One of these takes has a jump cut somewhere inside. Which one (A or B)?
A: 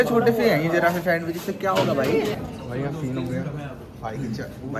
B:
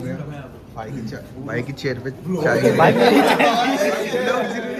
A